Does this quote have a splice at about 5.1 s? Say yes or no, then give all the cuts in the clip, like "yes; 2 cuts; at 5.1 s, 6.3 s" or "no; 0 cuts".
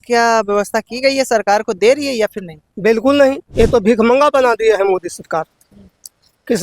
no; 1 cut; at 3.4 s